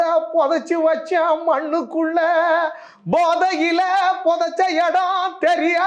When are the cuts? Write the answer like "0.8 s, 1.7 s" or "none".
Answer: none